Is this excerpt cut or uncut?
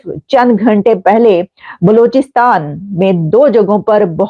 uncut